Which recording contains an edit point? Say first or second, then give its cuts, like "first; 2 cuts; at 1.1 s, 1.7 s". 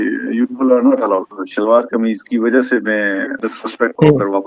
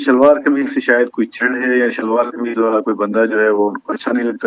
first; 1 cut; at 1.3 s